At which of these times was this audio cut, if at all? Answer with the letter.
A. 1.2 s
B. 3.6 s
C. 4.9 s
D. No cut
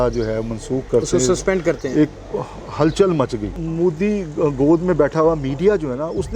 B